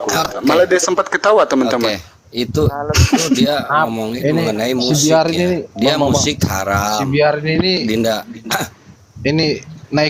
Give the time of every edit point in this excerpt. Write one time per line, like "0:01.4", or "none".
none